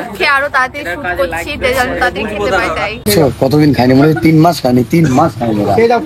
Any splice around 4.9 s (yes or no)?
no